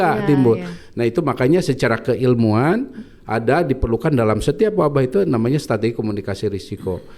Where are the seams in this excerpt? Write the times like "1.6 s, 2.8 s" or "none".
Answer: none